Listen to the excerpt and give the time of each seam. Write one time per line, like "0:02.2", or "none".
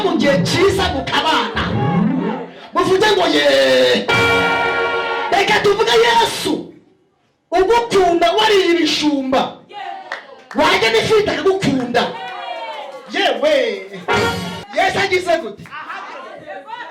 0:14.6